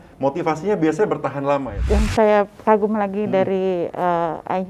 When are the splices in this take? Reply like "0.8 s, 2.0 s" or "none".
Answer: 1.7 s